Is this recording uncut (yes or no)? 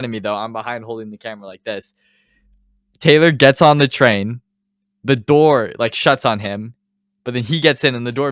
yes